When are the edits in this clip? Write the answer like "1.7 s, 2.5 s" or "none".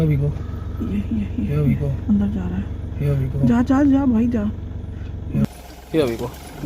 5.4 s